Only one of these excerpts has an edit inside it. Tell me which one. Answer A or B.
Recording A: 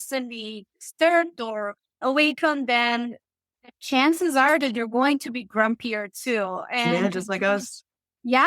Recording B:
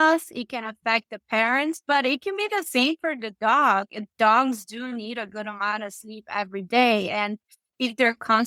A